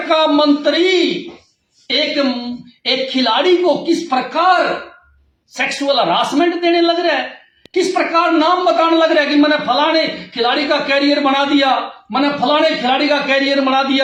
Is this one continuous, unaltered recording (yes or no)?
yes